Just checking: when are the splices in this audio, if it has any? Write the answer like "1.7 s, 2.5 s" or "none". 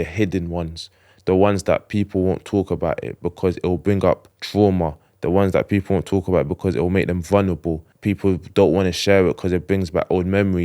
4.4 s, 7.9 s